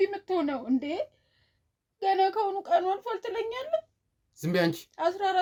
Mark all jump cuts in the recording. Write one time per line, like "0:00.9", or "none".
none